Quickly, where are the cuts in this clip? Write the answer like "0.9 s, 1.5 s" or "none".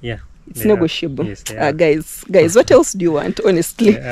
none